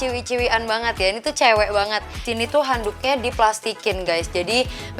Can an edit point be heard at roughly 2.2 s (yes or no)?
yes